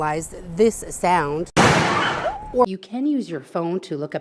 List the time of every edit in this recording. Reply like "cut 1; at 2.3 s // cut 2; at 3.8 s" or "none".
cut 1; at 2.6 s

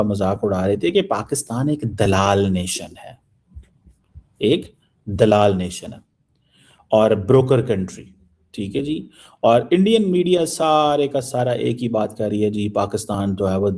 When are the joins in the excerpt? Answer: none

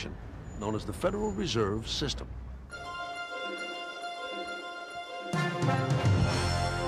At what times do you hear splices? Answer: none

